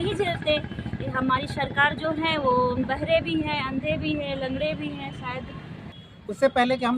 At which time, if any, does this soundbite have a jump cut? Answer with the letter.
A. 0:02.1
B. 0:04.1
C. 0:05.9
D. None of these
C